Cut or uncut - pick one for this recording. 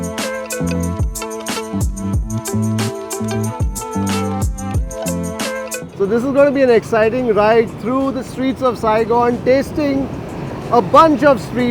uncut